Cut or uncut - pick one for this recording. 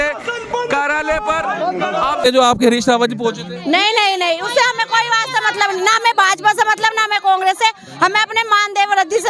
cut